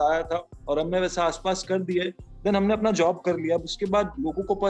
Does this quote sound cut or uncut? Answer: uncut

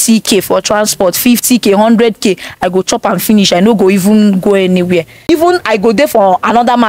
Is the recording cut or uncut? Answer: cut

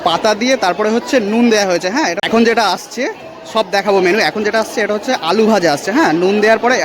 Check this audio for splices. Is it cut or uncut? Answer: cut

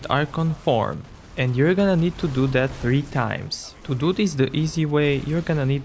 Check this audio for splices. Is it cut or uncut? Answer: cut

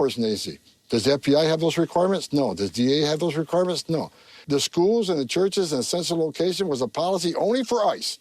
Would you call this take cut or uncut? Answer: cut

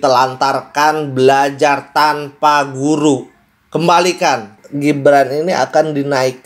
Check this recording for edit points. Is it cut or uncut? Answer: cut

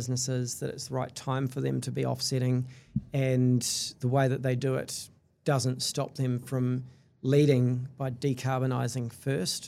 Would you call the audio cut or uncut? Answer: uncut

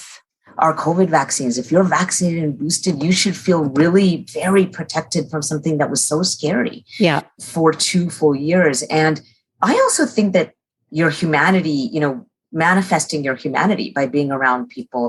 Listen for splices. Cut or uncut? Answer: cut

